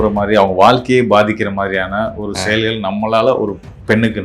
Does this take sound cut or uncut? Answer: uncut